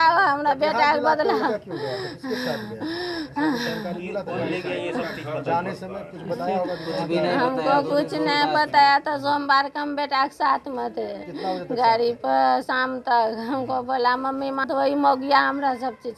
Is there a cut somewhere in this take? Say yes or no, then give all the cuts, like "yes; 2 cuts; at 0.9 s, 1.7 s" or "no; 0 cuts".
no; 0 cuts